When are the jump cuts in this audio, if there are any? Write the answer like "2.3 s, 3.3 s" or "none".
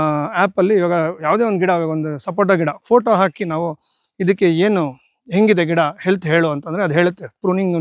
1.2 s